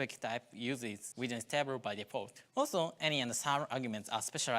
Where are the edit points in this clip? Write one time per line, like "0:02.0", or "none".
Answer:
0:01.0
0:02.4